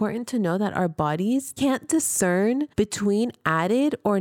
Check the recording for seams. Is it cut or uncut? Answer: cut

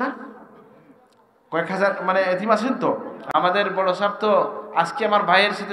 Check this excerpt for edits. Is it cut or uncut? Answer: cut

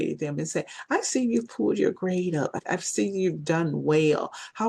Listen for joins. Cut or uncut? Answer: cut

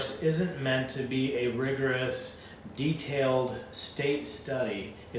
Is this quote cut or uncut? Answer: uncut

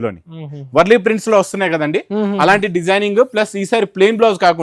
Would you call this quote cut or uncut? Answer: uncut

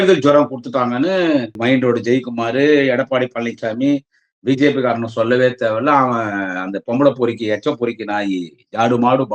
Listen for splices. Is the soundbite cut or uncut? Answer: cut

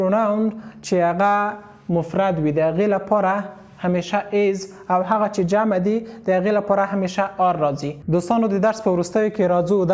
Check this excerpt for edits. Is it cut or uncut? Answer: cut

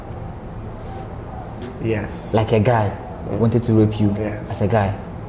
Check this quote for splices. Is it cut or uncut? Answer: cut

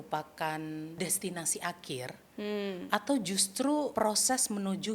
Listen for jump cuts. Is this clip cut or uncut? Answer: cut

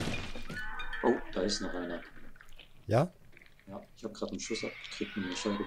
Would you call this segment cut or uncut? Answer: uncut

